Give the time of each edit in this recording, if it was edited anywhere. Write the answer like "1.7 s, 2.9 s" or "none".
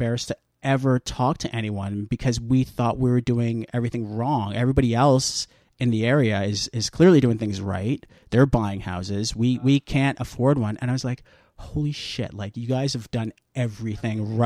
none